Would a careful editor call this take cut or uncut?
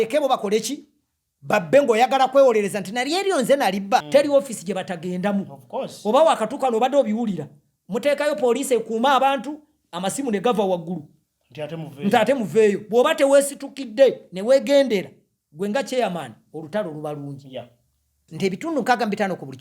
cut